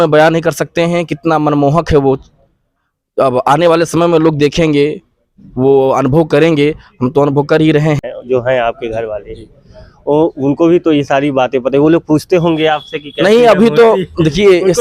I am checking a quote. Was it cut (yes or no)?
yes